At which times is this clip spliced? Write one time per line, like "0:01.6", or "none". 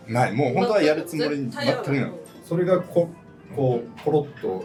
none